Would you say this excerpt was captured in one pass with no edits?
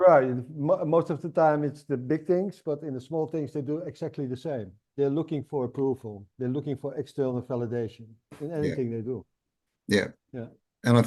yes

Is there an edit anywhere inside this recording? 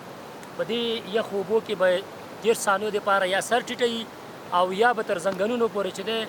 no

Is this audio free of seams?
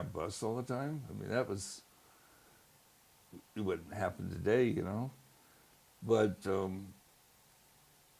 no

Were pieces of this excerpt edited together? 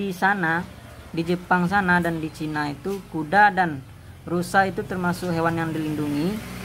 no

